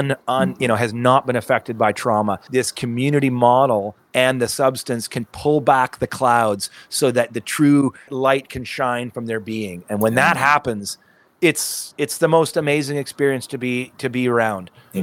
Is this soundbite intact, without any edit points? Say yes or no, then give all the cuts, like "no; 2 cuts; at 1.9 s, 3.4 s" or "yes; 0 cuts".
no; 2 cuts; at 2.4 s, 8.1 s